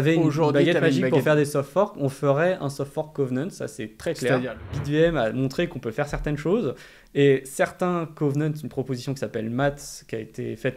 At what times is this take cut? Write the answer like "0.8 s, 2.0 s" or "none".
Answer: 4.7 s